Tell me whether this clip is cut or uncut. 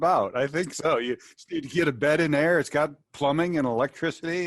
uncut